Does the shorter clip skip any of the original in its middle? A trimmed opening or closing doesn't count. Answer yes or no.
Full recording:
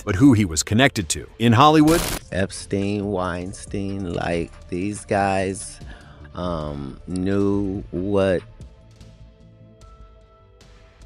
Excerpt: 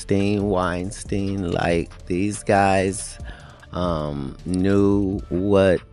no